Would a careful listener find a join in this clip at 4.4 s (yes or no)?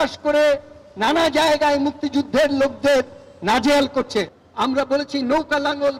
yes